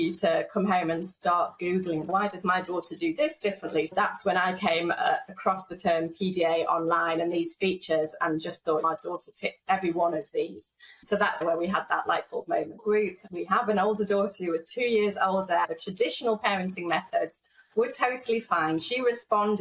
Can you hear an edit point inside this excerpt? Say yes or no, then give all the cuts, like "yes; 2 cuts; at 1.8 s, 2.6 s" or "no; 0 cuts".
yes; 5 cuts; at 2.1 s, 3.9 s, 11.4 s, 13.1 s, 15.7 s